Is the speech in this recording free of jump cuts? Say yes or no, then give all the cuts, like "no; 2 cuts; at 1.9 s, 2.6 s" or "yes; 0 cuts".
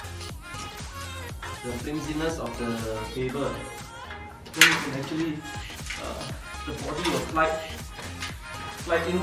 yes; 0 cuts